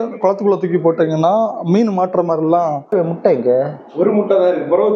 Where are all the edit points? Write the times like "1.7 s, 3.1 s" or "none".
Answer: 2.8 s